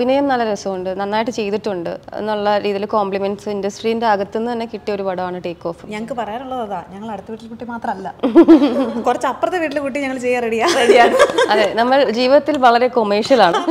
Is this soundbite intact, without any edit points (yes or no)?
no